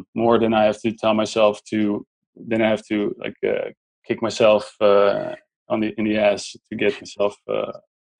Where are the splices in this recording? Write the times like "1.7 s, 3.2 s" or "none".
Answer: none